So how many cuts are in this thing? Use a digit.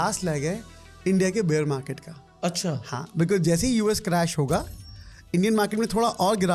0